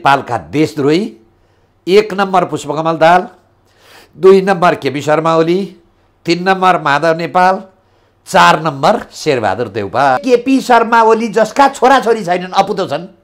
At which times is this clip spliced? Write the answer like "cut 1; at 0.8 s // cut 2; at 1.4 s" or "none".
cut 1; at 10.2 s